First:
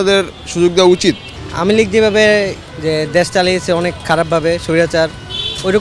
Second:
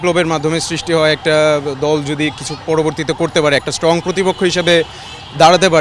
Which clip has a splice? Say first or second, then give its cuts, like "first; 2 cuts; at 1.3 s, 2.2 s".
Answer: first; 2 cuts; at 1.3 s, 2.6 s